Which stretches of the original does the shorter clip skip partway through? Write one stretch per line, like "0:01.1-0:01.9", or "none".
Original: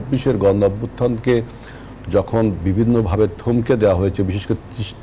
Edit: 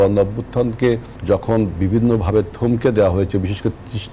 0:01.6-0:02.0